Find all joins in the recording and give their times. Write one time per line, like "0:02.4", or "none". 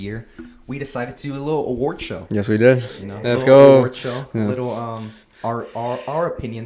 none